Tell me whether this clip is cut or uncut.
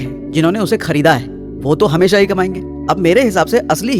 uncut